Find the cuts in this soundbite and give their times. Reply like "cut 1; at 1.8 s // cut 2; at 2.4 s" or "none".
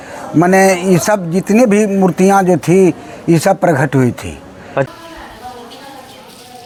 none